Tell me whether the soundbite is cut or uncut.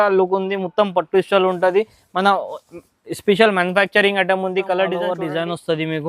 cut